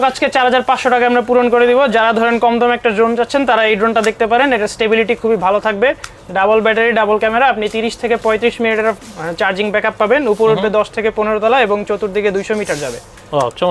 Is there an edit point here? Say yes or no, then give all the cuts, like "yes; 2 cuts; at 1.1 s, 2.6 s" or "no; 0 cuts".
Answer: no; 0 cuts